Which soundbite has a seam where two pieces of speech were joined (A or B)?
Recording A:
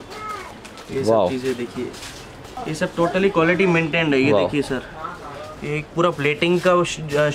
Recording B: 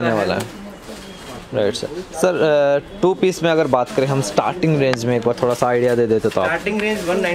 A